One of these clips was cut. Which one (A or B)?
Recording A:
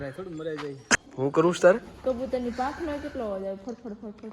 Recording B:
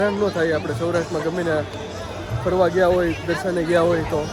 A